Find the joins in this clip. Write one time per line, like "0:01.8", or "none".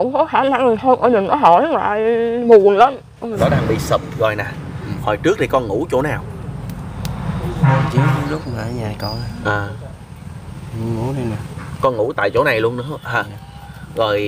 0:03.4